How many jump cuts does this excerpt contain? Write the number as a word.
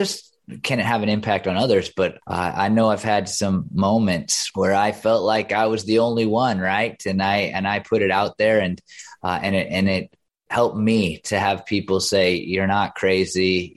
two